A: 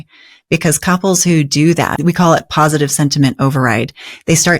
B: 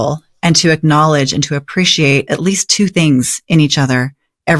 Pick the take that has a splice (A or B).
A